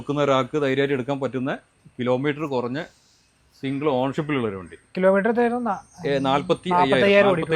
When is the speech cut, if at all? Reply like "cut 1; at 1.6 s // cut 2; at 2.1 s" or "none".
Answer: none